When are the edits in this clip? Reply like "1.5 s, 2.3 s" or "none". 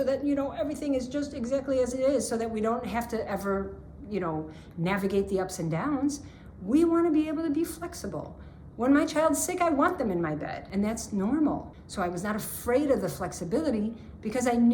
10.6 s, 11.8 s